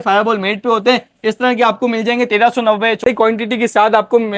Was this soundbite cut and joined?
yes; 1 cut; at 3.0 s

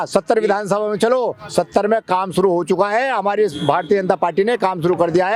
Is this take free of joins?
yes; 0 cuts

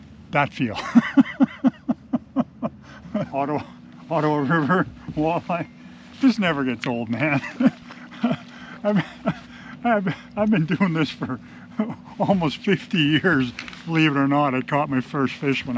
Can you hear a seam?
yes; 1 cut; at 3.3 s

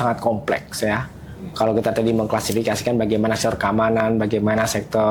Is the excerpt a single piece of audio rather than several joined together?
yes; 0 cuts

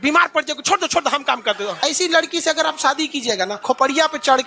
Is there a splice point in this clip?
yes; 2 cuts; at 1.8 s, 3.6 s

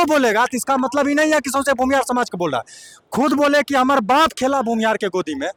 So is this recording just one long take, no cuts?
yes; 0 cuts

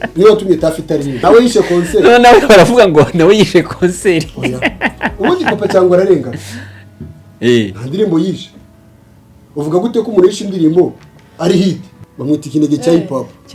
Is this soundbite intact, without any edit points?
no; 2 cuts; at 1.2 s, 12.1 s

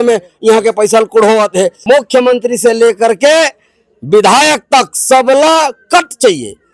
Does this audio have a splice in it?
yes; 1 cut; at 1.8 s

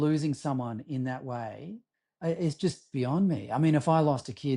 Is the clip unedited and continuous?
yes; 0 cuts

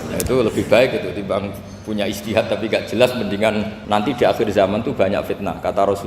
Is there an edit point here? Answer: yes; 1 cut; at 3.8 s

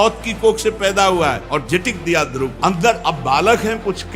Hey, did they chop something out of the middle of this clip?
yes; 2 cuts; at 1.4 s, 2.5 s

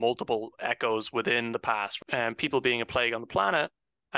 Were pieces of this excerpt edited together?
yes; 1 cut; at 2.0 s

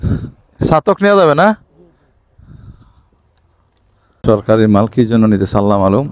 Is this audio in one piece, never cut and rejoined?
no; 1 cut; at 4.1 s

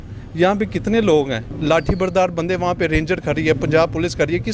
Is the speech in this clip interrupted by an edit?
yes; 1 cut; at 1.5 s

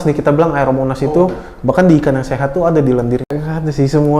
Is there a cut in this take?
yes; 1 cut; at 3.3 s

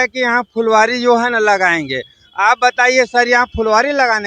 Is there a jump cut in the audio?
no; 0 cuts

